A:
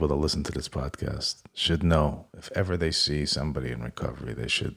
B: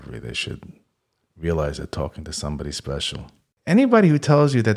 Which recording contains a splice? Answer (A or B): B